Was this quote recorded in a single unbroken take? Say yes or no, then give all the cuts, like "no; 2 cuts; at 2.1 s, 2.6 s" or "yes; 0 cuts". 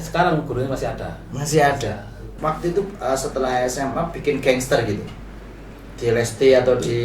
no; 1 cut; at 2.3 s